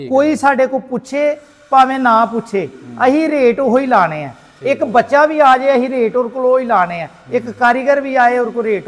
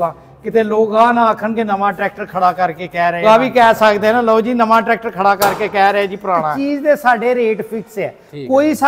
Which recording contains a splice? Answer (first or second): second